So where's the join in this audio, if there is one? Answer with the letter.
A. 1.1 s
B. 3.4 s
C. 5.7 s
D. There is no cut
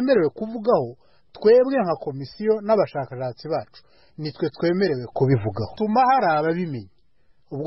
C